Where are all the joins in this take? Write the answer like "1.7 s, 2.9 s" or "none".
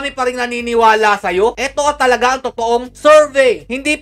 none